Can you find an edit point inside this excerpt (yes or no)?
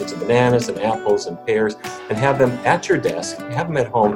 no